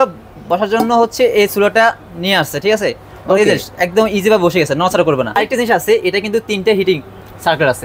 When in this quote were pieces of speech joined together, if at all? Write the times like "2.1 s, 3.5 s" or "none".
5.4 s